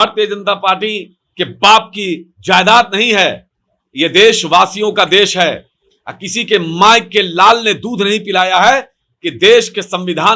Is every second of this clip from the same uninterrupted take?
yes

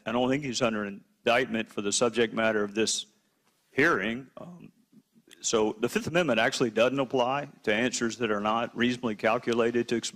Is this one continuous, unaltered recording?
yes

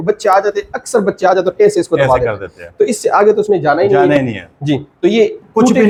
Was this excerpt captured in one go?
yes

